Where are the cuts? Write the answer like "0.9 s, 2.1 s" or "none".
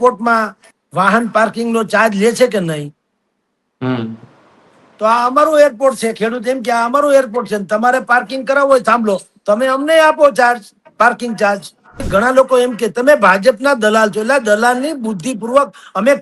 12.1 s